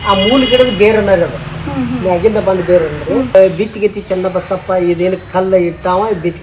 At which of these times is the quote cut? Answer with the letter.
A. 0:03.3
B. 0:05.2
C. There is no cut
A